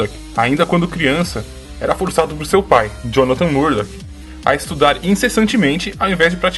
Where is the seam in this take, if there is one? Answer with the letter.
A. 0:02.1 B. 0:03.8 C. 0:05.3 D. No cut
B